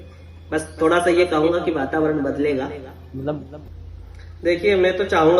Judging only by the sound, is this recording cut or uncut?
cut